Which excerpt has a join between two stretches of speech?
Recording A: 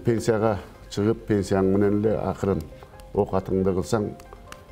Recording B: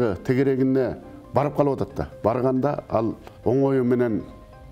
B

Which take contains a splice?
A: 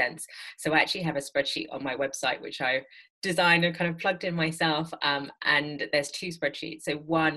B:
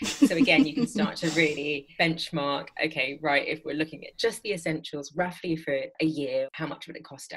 B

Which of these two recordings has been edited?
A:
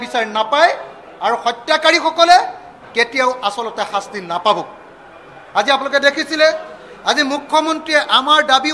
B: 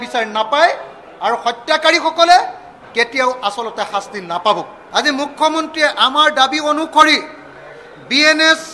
B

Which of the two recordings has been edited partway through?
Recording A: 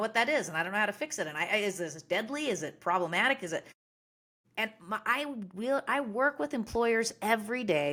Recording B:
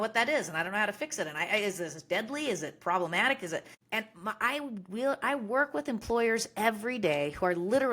B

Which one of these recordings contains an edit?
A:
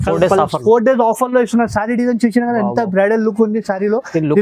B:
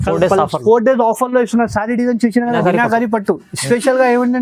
B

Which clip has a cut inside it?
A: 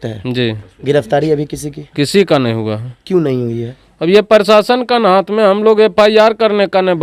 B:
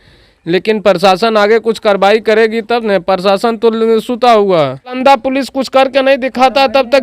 B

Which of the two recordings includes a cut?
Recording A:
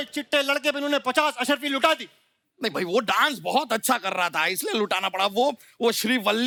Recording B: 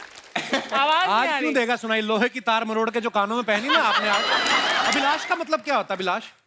B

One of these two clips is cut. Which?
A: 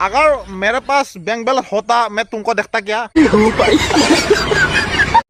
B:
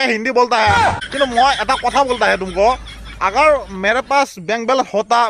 B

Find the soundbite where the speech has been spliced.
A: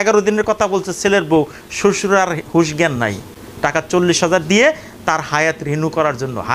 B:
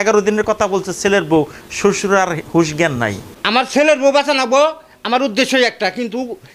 B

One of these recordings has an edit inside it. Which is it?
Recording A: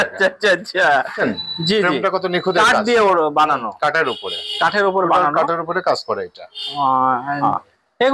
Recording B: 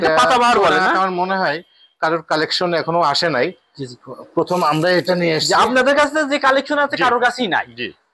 A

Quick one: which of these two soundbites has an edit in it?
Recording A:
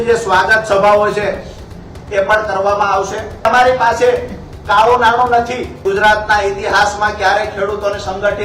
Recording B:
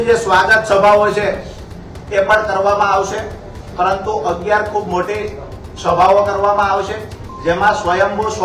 A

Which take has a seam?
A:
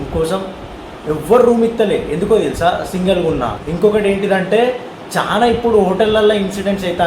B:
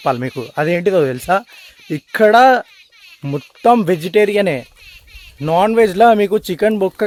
A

